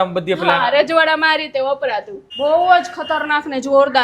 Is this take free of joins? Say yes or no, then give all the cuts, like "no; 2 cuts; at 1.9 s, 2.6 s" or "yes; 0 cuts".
no; 1 cut; at 2.2 s